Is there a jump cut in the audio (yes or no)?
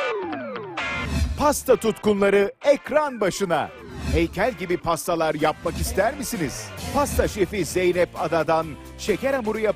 yes